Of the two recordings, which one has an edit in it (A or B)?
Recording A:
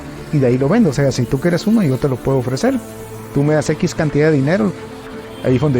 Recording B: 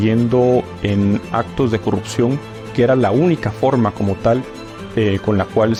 A